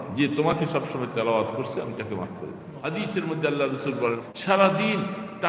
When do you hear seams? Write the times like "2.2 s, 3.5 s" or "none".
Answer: 2.7 s, 4.2 s